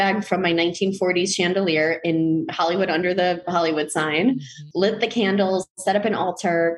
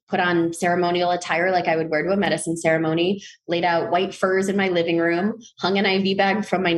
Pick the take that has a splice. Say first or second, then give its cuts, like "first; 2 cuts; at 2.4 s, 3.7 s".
first; 1 cut; at 4.6 s